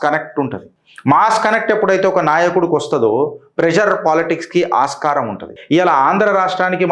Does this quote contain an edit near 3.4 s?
no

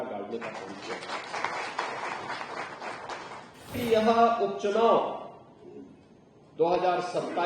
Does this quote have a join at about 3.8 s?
yes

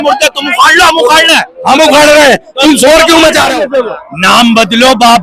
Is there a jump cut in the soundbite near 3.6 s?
yes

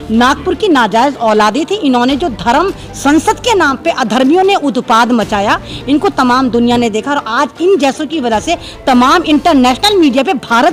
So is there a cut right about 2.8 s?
no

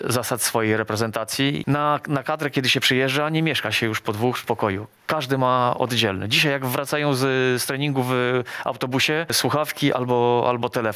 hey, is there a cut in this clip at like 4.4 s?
yes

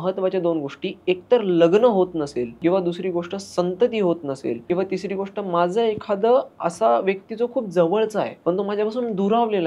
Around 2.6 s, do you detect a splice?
yes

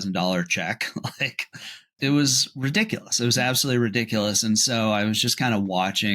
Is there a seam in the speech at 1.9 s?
yes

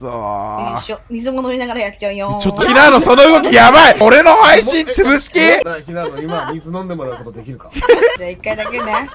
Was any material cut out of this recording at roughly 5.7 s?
yes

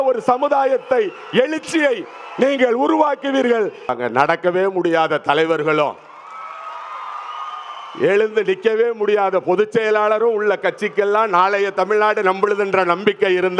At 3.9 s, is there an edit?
yes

